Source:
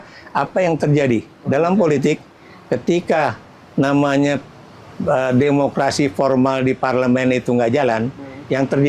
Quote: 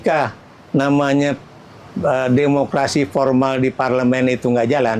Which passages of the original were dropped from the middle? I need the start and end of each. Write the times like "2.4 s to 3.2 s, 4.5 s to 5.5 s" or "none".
none